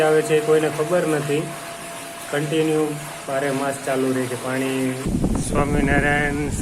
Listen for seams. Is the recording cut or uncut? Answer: cut